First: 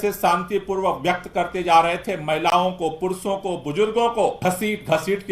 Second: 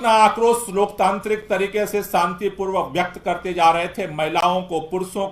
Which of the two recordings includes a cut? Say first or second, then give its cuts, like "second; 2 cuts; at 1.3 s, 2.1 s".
first; 1 cut; at 4.4 s